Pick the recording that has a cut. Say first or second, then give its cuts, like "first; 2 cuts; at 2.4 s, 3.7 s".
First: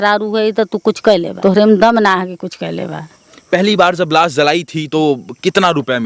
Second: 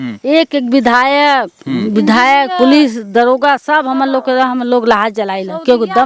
first; 2 cuts; at 1.3 s, 3.3 s